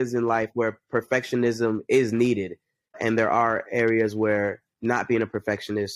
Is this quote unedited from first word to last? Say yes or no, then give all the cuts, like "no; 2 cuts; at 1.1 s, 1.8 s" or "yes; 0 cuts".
yes; 0 cuts